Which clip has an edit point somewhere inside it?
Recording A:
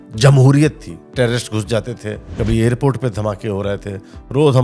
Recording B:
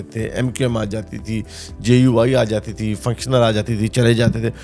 A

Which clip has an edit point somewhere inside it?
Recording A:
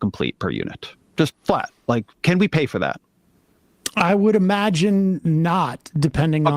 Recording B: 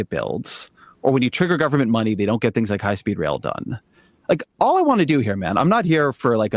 A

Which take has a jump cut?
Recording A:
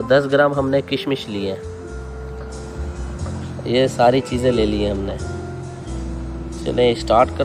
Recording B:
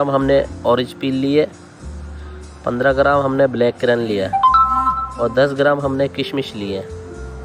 A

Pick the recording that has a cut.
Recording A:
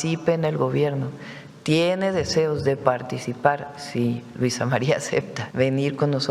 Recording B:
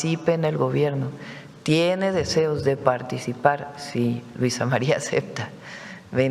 A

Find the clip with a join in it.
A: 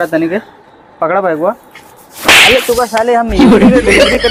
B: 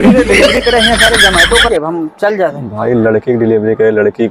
B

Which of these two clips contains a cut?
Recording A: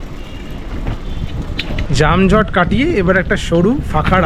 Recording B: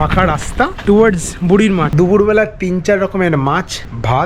B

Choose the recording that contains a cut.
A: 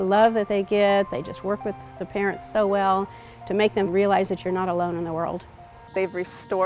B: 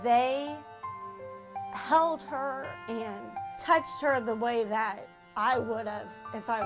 A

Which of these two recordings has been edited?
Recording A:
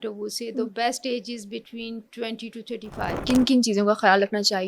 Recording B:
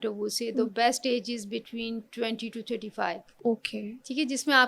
A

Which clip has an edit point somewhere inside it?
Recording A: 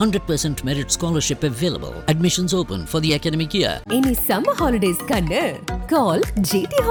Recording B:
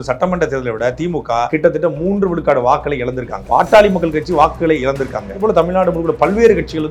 B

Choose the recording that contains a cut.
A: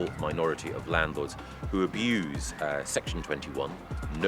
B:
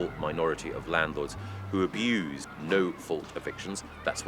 B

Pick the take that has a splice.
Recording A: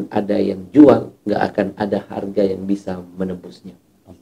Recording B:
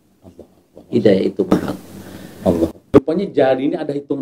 B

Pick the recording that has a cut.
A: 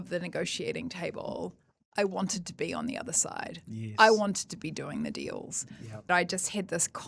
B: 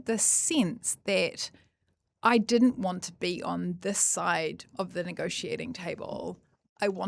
A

